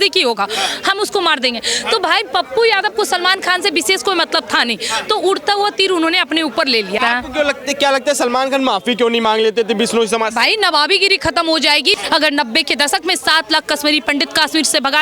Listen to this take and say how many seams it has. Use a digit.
2